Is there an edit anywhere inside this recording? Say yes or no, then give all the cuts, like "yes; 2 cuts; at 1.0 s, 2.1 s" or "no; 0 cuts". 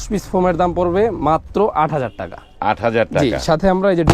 no; 0 cuts